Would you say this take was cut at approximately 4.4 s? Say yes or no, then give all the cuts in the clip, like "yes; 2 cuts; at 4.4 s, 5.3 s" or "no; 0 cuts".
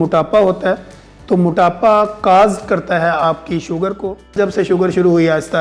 yes; 1 cut; at 4.4 s